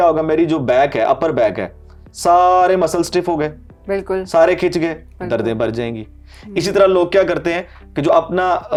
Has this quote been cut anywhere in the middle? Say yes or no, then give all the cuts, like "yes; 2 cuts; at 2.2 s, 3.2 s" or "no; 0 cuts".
no; 0 cuts